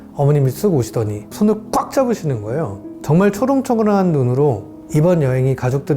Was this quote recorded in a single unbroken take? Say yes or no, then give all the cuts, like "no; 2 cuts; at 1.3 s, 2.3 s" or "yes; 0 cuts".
no; 3 cuts; at 1.2 s, 2.9 s, 4.7 s